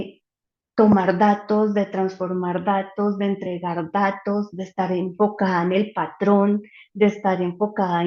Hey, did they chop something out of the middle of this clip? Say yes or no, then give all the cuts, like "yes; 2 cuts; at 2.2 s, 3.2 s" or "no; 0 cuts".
no; 0 cuts